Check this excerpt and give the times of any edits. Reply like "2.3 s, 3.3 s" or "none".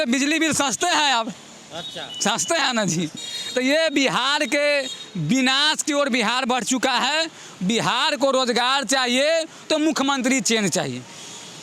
none

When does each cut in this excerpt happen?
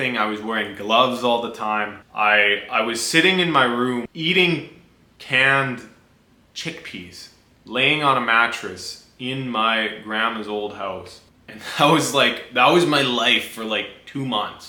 none

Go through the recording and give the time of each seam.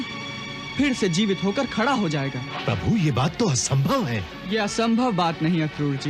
2.5 s, 4.3 s

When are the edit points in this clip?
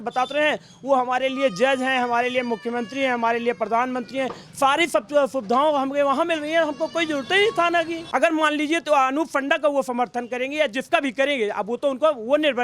8.0 s

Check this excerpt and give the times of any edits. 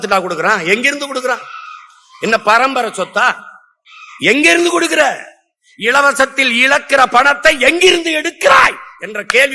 none

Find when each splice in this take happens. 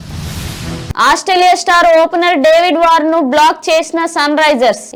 none

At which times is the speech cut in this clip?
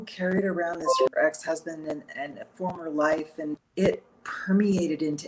1.1 s, 3.6 s

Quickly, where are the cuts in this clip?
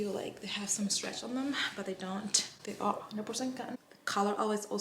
3.7 s

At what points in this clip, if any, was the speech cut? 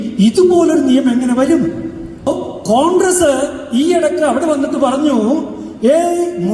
2.3 s

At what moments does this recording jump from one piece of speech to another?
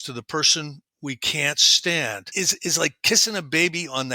2.2 s

